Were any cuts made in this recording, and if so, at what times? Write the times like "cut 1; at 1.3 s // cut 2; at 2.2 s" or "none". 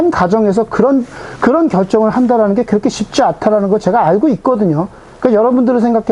none